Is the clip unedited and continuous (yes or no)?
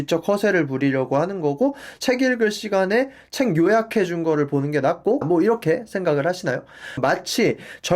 no